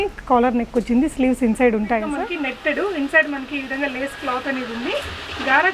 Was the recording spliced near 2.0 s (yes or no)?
yes